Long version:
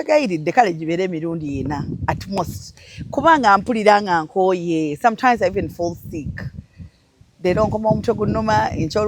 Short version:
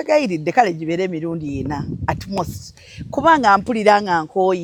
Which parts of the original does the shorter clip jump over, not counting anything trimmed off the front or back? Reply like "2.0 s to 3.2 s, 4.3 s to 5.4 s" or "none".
none